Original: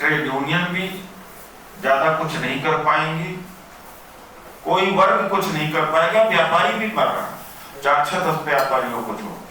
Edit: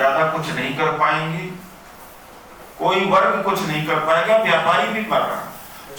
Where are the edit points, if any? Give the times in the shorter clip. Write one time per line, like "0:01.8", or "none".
none